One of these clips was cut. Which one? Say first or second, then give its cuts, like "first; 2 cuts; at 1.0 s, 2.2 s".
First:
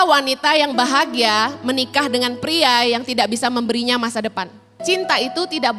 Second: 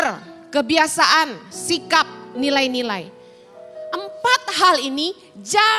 first; 1 cut; at 4.8 s